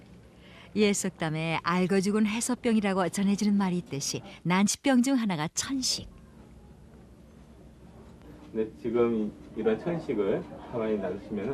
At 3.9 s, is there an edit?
yes; 1 cut; at 3.9 s

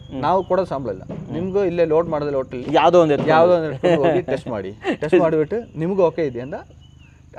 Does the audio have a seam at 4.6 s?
no; 0 cuts

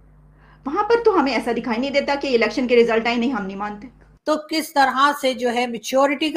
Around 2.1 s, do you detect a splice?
no; 1 cut; at 4.1 s

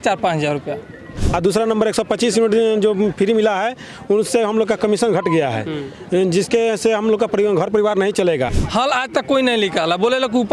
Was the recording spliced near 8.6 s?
yes; 2 cuts; at 1.1 s, 8.6 s

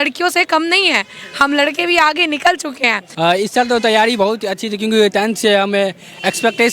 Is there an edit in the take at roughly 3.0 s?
yes; 1 cut; at 3.0 s

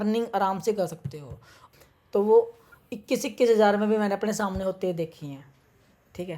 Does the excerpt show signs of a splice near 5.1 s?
no; 1 cut; at 1.6 s

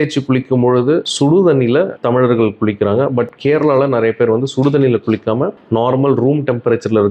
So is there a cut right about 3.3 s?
no; 0 cuts

